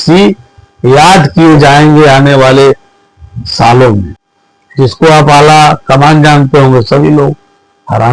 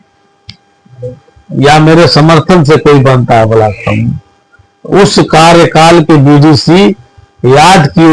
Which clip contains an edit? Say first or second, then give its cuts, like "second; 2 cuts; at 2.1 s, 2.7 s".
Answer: first; 1 cut; at 4.6 s